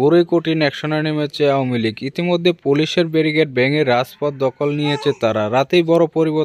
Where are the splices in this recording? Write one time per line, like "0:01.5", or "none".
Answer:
none